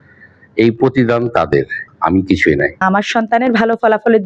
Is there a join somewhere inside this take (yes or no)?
yes